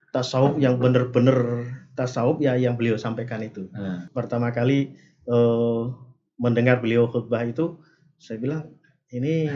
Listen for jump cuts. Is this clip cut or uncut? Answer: cut